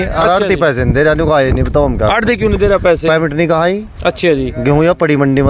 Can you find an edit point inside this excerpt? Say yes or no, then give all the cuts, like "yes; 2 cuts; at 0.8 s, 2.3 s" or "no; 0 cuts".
no; 0 cuts